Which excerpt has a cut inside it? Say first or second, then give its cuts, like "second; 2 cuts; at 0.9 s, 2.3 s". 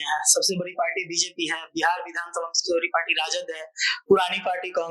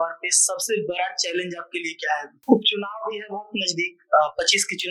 second; 1 cut; at 2.3 s